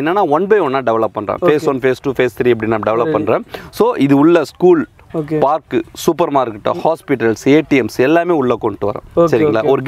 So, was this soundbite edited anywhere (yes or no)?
no